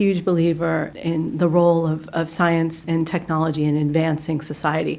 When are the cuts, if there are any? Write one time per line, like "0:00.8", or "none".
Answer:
0:00.9
0:02.8

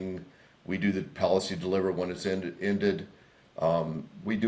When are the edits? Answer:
none

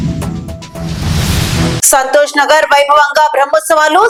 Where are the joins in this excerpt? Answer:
none

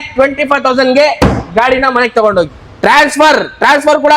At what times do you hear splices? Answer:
0:02.6

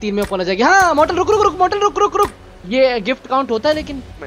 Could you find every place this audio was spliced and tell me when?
0:02.4

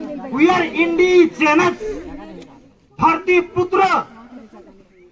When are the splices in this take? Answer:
none

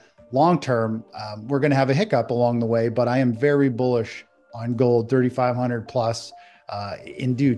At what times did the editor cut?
none

